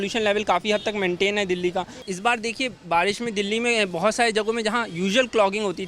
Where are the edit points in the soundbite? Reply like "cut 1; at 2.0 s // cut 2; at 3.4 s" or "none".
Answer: cut 1; at 2.0 s